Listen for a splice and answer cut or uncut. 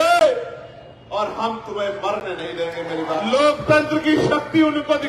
cut